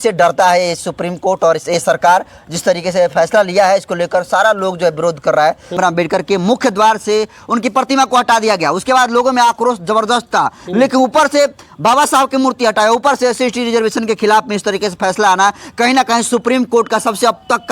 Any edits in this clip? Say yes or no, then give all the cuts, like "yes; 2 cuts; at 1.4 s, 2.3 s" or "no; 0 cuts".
yes; 1 cut; at 5.7 s